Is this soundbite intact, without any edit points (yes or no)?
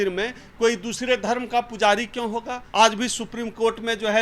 no